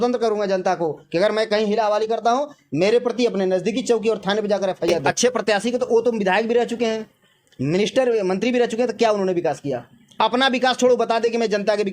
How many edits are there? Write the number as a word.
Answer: one